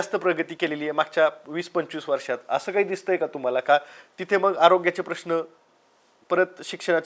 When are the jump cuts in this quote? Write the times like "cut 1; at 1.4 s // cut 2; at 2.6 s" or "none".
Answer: none